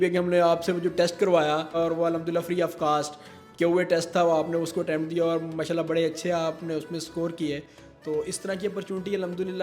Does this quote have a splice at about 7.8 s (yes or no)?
no